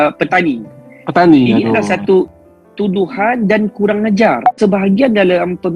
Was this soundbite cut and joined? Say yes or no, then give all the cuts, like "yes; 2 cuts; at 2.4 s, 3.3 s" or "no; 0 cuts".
yes; 2 cuts; at 2.3 s, 4.5 s